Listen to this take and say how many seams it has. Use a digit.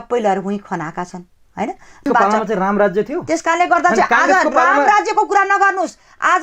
1